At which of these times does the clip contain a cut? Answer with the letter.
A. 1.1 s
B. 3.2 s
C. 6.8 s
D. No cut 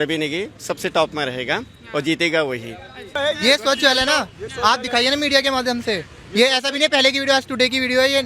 B